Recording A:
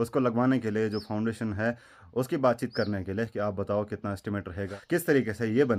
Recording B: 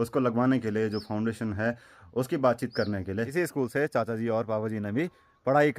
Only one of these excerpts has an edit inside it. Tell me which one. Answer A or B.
B